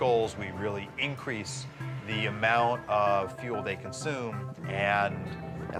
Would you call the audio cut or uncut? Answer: uncut